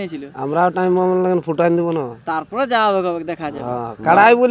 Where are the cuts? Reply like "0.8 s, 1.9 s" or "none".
none